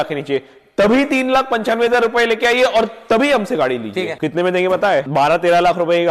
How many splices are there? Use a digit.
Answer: 2